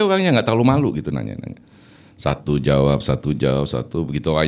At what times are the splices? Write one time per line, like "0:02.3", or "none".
none